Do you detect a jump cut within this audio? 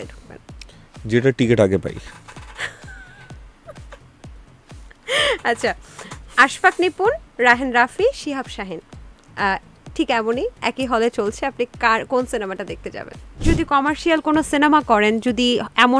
yes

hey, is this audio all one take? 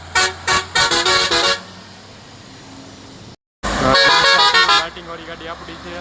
no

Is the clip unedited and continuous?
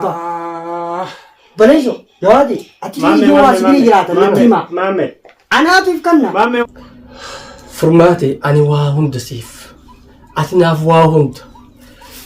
no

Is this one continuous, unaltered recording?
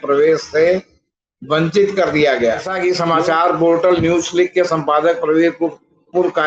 no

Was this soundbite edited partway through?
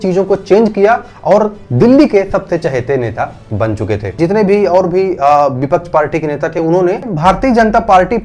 yes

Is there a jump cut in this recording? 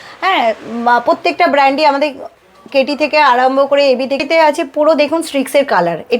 yes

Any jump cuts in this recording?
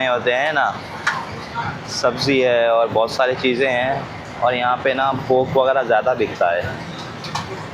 no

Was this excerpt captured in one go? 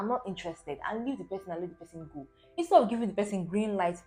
yes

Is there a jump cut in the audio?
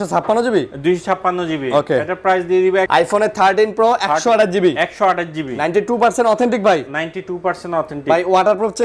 yes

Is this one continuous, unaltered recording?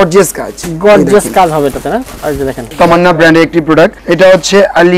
no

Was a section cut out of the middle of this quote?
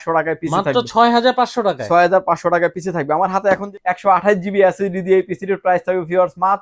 yes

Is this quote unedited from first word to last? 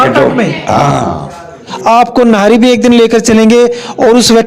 no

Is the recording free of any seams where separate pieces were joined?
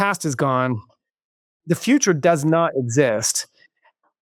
yes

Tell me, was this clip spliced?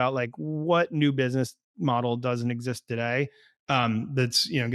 no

